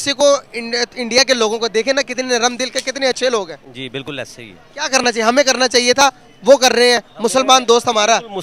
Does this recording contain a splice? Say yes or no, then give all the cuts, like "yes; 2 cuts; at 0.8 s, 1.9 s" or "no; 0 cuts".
no; 0 cuts